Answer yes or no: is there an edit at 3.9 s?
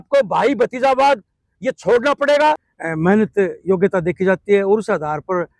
no